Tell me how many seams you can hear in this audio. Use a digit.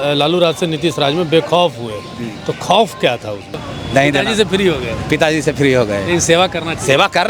1